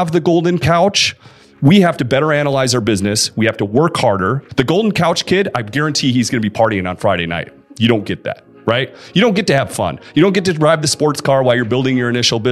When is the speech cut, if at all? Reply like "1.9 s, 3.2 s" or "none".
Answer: 4.4 s